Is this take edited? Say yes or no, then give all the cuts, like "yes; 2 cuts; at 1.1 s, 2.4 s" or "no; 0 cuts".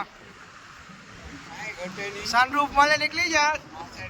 no; 0 cuts